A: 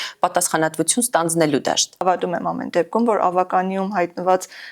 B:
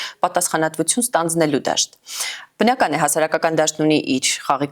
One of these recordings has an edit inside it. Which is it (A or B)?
A